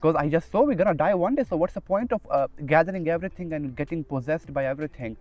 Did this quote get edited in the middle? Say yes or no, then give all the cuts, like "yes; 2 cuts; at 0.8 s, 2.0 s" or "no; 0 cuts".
no; 0 cuts